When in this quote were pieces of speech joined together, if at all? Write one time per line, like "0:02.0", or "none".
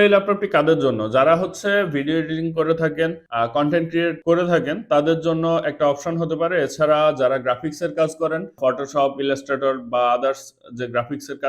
0:03.2
0:04.2